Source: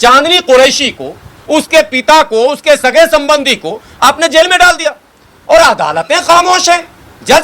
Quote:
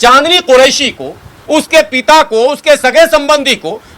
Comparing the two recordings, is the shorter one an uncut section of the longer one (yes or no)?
yes